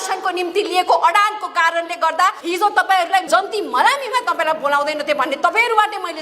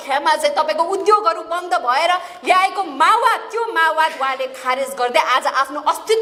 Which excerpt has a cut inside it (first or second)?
first